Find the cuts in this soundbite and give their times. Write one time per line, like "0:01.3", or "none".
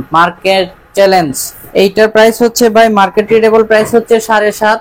none

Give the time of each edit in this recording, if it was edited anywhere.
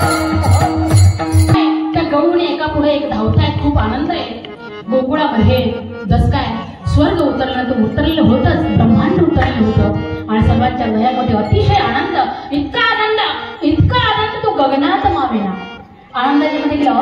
0:01.7

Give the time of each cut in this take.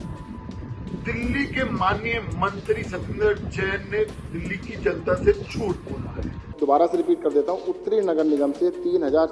0:06.5

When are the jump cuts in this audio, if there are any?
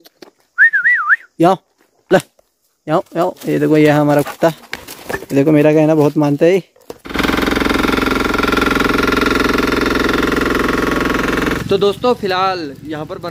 0:07.1
0:11.6

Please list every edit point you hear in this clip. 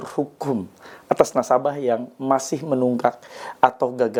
none

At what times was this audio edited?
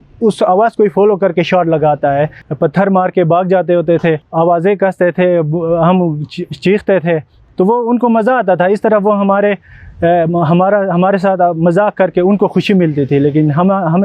0:02.4
0:04.2

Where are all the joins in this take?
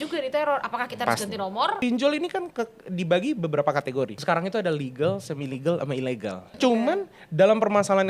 0:01.8
0:04.2
0:06.5

